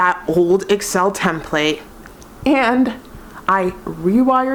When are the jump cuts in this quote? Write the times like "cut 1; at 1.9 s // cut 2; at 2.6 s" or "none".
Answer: none